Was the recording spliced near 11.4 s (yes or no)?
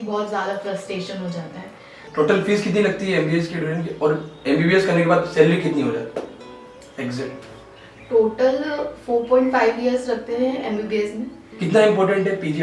yes